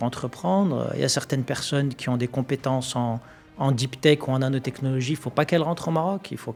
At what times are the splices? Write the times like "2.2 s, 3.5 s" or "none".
none